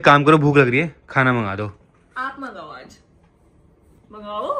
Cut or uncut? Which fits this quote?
uncut